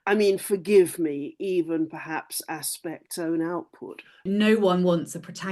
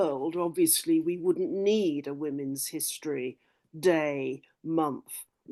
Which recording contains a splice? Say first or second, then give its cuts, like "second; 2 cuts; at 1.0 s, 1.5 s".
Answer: first; 1 cut; at 4.2 s